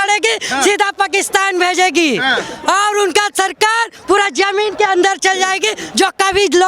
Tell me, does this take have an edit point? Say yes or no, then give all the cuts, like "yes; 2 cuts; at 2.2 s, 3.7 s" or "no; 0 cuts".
no; 0 cuts